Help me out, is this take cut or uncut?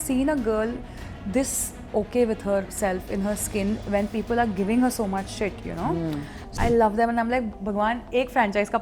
cut